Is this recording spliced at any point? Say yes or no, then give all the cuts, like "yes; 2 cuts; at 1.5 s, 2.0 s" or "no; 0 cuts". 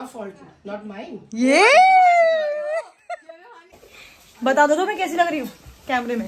yes; 1 cut; at 3.8 s